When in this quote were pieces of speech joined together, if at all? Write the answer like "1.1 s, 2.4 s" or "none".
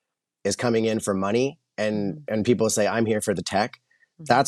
none